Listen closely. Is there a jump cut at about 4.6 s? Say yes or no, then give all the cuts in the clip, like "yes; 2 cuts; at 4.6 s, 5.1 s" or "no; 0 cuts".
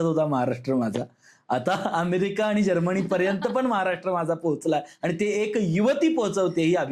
no; 0 cuts